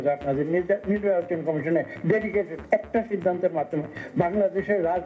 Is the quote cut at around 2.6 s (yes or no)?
yes